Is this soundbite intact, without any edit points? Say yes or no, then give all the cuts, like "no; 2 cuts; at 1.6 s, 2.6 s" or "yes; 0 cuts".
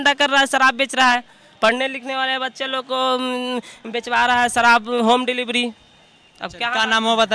yes; 0 cuts